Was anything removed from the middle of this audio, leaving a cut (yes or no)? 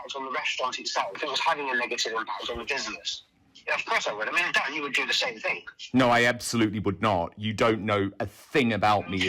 no